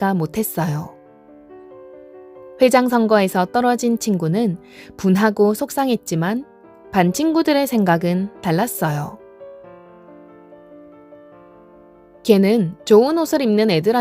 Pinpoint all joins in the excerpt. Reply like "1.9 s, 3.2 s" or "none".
9.2 s, 12.2 s